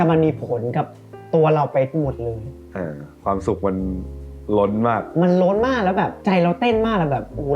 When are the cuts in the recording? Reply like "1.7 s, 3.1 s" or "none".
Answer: none

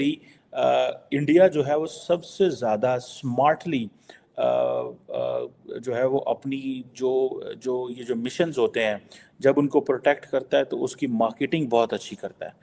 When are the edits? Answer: none

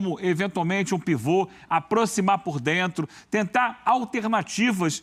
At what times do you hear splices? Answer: none

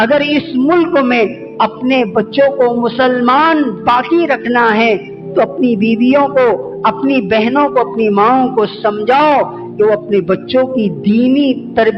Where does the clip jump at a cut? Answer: none

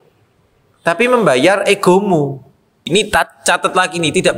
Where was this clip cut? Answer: 2.9 s

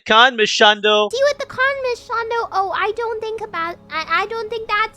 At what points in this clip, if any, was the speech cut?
1.1 s

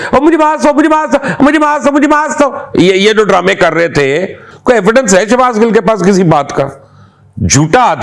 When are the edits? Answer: 4.4 s

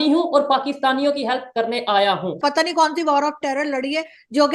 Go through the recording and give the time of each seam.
2.4 s

